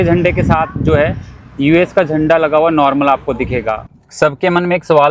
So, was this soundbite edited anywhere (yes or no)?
yes